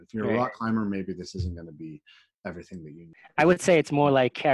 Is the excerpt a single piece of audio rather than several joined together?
no; 1 cut; at 3.2 s

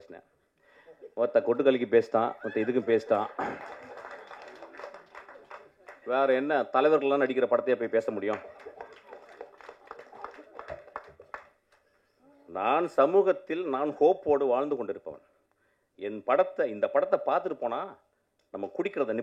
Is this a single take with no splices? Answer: yes; 0 cuts

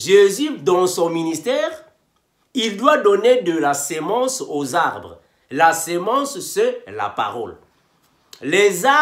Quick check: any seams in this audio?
no; 0 cuts

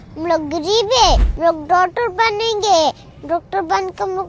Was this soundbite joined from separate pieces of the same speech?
yes; 1 cut; at 1.3 s

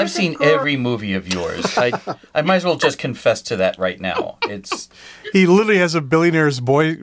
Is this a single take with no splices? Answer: yes; 0 cuts

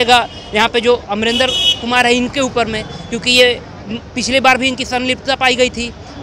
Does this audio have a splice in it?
no; 0 cuts

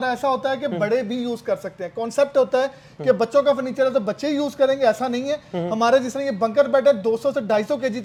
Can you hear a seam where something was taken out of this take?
no; 0 cuts

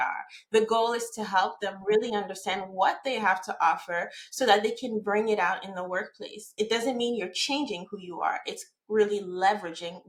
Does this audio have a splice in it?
no; 0 cuts

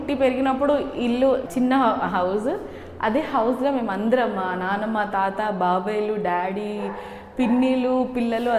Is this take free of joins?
no; 1 cut; at 1.5 s

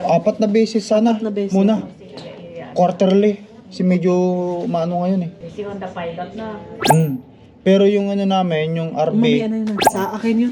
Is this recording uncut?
no; 1 cut; at 5.4 s

